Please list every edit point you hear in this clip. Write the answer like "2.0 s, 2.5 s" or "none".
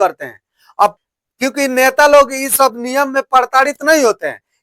1.0 s